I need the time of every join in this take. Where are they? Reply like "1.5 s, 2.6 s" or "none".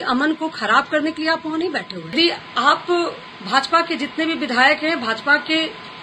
2.1 s